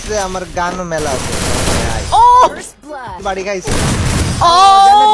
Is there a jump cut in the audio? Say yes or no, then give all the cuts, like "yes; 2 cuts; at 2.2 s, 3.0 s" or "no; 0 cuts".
yes; 1 cut; at 3.2 s